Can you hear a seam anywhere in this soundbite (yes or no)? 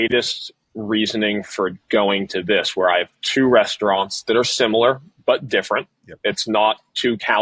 no